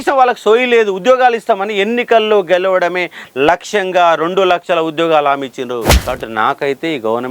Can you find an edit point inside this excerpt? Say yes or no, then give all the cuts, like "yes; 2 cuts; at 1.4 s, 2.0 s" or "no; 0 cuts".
yes; 1 cut; at 6.0 s